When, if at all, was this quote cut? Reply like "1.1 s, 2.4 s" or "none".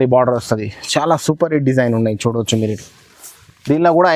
none

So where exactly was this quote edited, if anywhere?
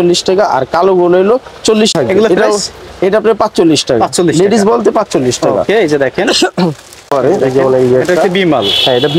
1.9 s, 7.1 s

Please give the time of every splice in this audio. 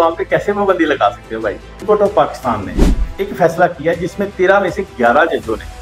1.8 s

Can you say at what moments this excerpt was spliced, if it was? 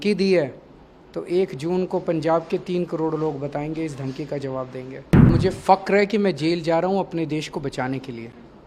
5.3 s

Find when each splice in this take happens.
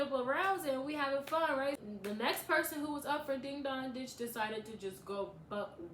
1.8 s

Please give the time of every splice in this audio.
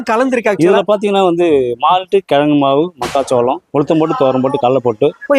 none

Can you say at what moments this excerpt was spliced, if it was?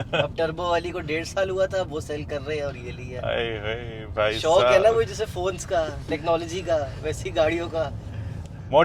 none

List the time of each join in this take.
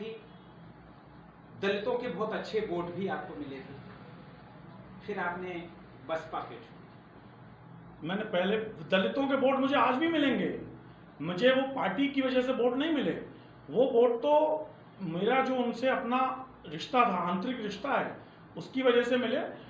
none

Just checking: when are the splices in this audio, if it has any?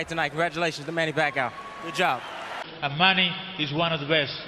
2.4 s

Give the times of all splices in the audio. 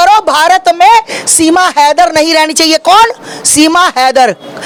none

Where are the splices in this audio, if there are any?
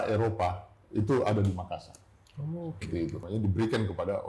3.2 s

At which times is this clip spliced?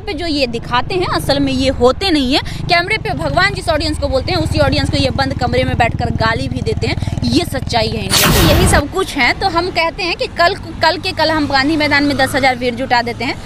8.3 s

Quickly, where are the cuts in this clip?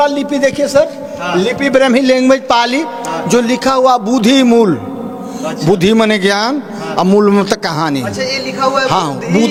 none

